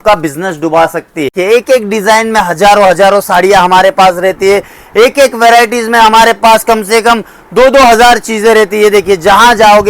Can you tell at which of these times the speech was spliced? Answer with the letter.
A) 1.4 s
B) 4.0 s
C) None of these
A